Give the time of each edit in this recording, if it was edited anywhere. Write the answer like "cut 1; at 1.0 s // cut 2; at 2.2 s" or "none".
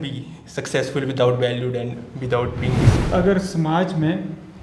cut 1; at 2.9 s